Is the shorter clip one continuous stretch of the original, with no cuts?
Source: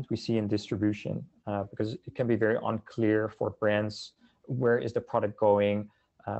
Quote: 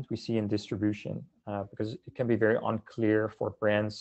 yes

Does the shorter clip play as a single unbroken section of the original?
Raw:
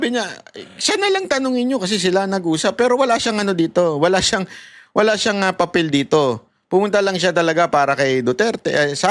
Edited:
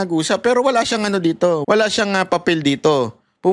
no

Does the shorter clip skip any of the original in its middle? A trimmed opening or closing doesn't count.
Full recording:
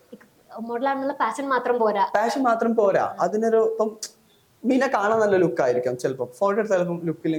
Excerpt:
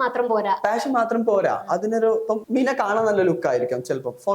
yes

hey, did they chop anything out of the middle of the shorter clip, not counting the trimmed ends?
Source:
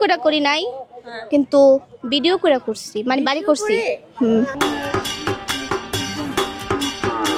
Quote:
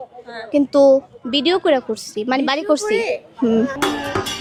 no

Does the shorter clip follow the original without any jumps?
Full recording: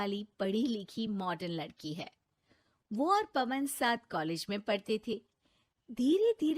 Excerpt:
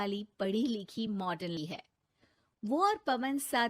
no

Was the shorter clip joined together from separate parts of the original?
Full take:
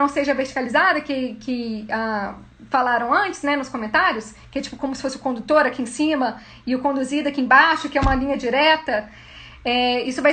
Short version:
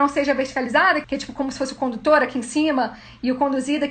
yes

